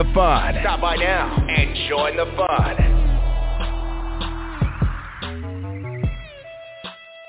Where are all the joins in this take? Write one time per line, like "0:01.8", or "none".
none